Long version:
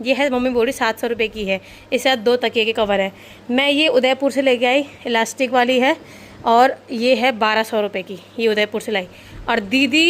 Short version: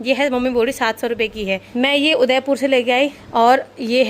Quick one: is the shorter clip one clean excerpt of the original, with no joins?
no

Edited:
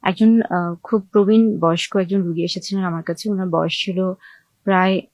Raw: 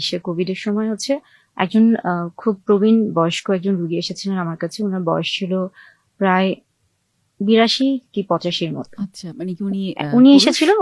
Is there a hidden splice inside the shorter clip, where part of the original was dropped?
no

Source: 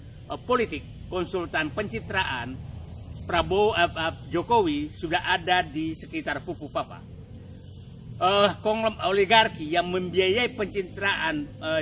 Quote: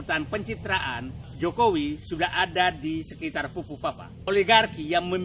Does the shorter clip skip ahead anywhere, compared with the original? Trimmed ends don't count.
yes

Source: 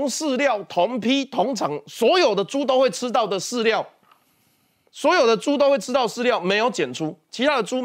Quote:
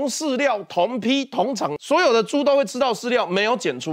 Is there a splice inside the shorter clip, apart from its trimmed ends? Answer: yes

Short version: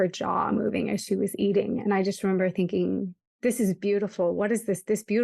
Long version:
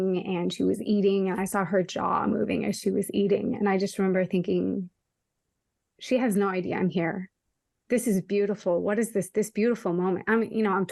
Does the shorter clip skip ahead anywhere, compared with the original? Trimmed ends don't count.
yes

